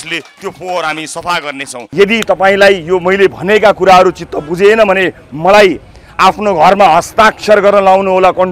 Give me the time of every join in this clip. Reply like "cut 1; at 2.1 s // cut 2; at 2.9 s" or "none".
cut 1; at 1.8 s